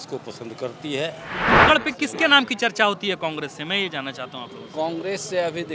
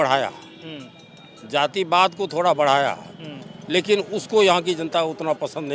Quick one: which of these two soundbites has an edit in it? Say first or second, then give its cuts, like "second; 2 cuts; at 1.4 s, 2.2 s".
first; 1 cut; at 1.5 s